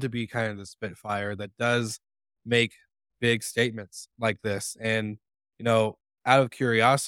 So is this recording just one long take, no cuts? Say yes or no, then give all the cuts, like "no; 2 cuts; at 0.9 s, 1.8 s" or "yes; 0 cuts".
yes; 0 cuts